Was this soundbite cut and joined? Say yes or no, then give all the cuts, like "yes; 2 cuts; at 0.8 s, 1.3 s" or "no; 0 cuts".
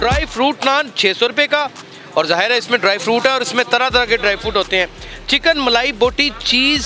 no; 0 cuts